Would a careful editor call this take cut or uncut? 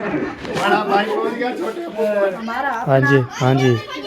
cut